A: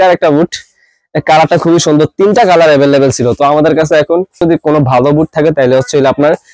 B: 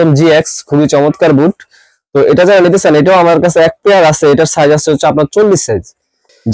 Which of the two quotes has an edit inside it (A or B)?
A